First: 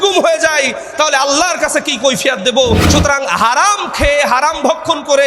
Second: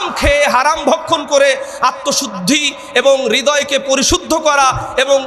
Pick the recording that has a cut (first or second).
first